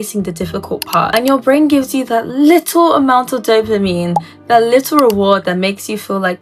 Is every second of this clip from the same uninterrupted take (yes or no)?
no